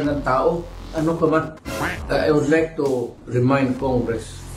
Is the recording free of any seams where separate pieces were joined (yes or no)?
no